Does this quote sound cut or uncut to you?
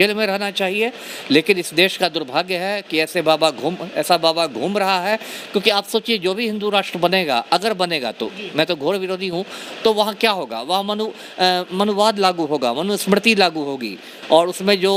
uncut